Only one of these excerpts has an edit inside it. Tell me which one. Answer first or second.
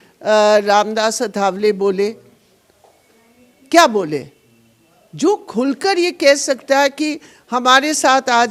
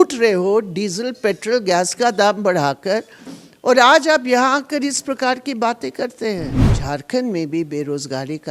second